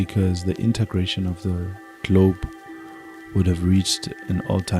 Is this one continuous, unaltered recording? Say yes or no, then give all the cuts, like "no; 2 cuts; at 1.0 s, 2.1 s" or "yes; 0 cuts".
yes; 0 cuts